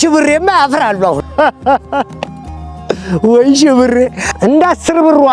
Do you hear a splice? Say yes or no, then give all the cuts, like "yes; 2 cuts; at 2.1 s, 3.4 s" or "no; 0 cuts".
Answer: yes; 1 cut; at 4.2 s